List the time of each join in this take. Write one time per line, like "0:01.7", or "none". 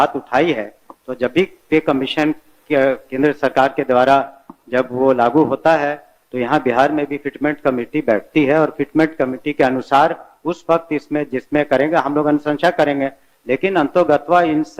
none

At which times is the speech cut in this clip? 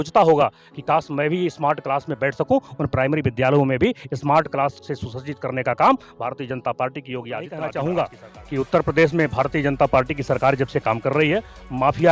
0:07.5

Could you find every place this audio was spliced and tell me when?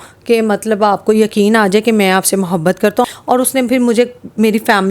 0:03.0

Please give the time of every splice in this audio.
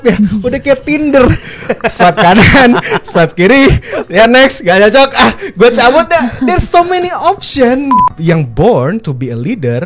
0:08.0

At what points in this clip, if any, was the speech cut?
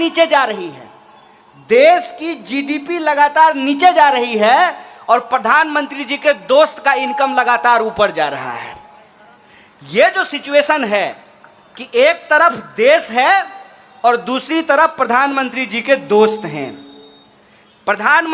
none

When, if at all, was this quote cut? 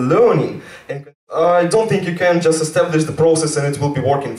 0:01.2

